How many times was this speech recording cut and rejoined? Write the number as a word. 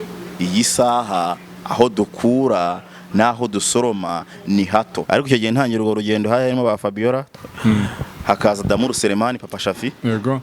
two